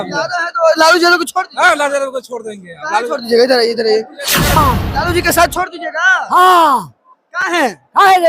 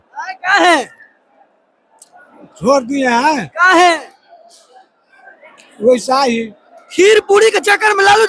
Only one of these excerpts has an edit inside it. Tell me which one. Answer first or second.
first